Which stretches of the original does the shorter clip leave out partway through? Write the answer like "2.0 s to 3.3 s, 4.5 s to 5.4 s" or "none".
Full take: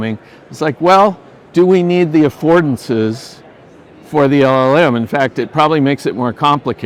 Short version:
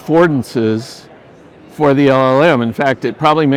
none